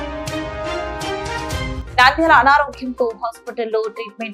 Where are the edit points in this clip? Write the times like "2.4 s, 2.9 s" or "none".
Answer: none